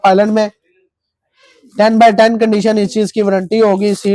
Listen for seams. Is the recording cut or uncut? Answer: uncut